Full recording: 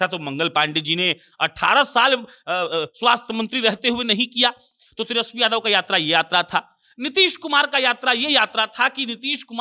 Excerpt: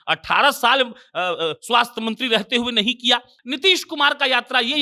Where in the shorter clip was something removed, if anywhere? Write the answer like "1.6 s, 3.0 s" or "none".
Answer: 3.4 s